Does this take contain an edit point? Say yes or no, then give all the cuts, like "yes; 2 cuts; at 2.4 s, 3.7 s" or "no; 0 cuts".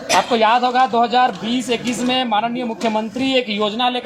no; 0 cuts